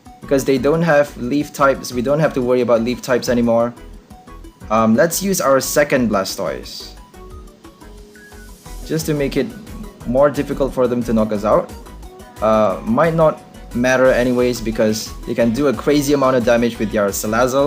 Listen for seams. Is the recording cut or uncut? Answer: uncut